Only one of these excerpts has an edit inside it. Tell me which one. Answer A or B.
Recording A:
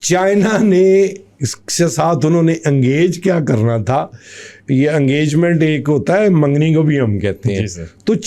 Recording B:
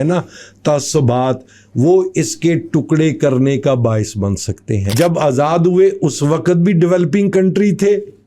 B